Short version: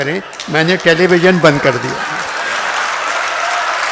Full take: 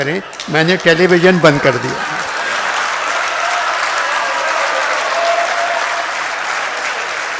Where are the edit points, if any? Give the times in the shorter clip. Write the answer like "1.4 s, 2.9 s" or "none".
none